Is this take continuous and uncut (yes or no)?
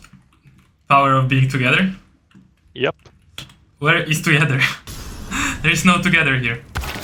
yes